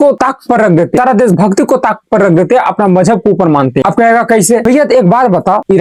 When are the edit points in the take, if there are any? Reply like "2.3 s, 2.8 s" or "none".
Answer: none